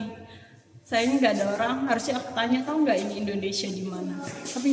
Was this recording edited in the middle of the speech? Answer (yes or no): no